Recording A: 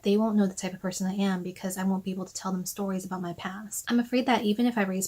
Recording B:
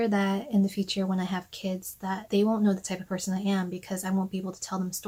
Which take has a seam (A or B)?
A